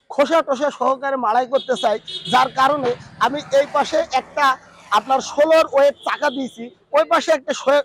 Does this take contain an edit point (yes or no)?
no